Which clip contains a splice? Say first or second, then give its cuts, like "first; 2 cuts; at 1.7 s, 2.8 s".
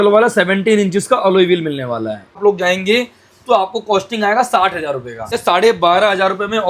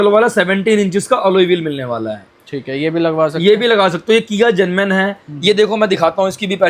first; 2 cuts; at 2.4 s, 5.3 s